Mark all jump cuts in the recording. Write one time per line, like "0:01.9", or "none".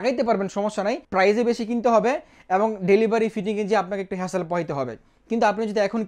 0:01.0